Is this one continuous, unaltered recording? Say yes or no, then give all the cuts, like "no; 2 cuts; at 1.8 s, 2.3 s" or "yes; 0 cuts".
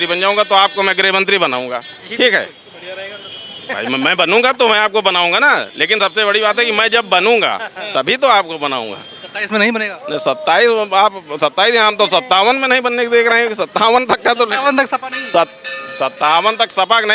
yes; 0 cuts